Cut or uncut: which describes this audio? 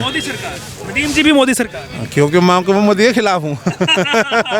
uncut